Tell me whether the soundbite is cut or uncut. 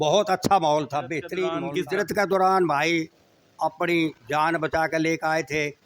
cut